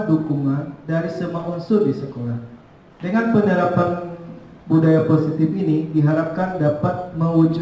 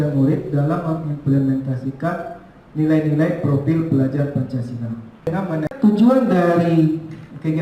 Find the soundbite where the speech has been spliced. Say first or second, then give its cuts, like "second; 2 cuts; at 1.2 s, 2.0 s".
second; 1 cut; at 5.6 s